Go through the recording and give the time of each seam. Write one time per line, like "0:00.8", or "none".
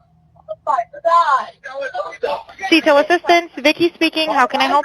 0:03.5